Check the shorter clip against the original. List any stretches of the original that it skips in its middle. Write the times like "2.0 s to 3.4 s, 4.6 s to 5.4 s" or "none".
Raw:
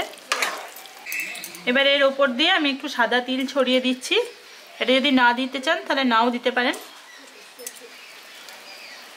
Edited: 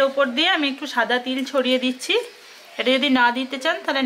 none